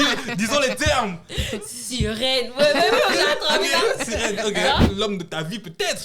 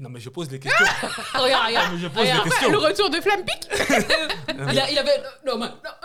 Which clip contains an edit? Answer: first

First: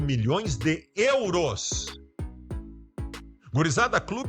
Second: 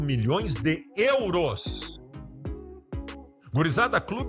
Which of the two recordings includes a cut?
first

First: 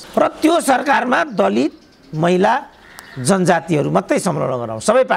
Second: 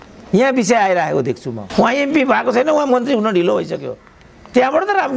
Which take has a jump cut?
second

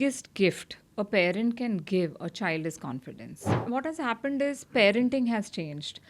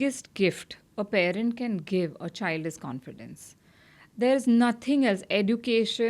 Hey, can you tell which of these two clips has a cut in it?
first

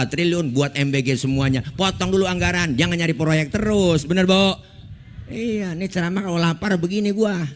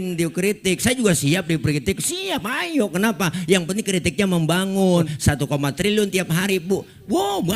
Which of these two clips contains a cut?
second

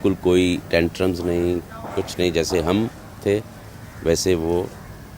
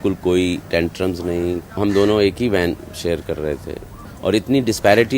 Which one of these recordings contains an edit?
second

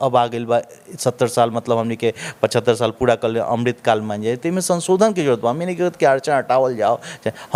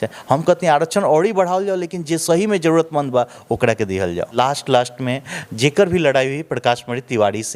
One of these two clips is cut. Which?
second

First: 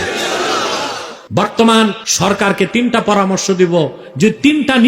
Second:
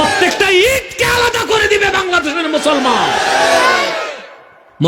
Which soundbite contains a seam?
first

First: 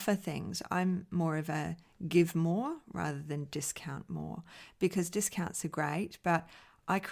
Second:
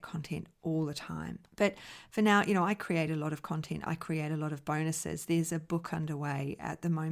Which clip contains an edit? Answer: second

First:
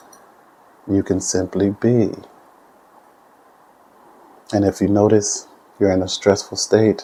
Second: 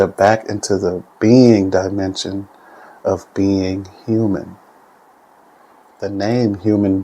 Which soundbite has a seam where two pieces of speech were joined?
second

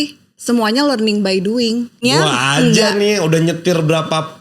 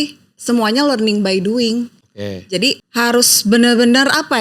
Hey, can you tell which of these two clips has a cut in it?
first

